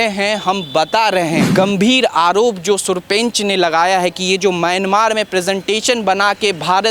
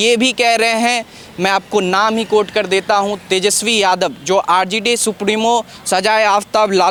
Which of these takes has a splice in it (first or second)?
first